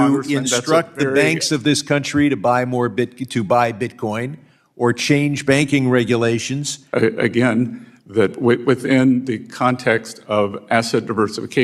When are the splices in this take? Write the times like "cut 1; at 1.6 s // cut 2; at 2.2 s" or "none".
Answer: cut 1; at 6.9 s